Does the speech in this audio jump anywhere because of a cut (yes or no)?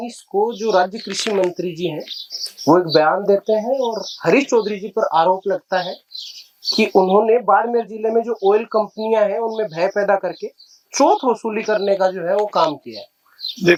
no